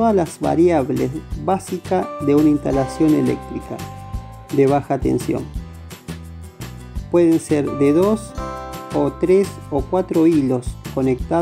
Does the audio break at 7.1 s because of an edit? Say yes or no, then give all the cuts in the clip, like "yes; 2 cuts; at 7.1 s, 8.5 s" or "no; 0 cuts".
yes; 2 cuts; at 5.5 s, 7.1 s